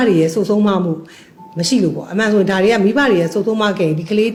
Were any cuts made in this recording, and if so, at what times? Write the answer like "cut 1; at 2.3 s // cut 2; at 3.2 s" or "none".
none

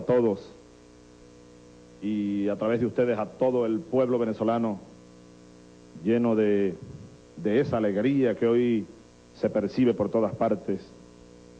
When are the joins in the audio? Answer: none

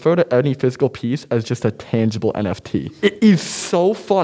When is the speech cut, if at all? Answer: cut 1; at 2.9 s

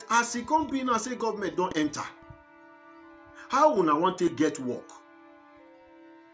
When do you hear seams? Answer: cut 1; at 2.1 s // cut 2; at 3.5 s // cut 3; at 5.5 s

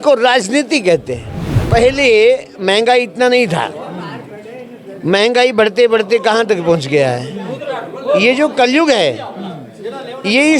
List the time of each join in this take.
cut 1; at 1.6 s

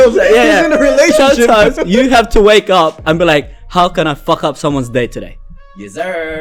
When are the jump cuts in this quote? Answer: none

